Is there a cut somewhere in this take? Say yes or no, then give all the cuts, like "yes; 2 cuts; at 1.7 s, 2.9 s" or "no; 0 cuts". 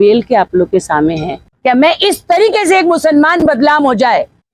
yes; 1 cut; at 1.5 s